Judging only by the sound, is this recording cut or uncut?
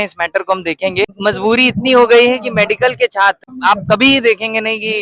cut